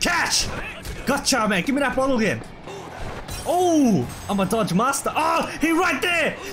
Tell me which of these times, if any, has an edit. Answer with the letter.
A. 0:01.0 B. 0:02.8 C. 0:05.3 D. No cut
B